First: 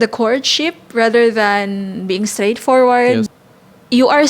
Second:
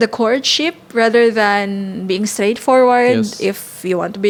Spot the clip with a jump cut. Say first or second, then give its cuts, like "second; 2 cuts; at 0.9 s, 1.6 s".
first; 1 cut; at 3.3 s